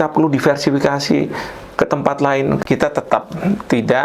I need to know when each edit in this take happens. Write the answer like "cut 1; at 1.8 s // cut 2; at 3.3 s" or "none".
cut 1; at 2.6 s